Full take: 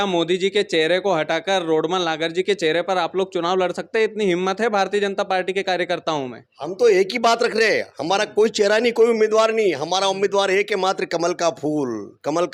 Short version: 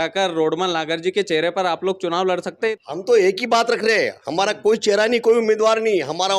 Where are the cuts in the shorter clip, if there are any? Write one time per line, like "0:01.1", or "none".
0:02.8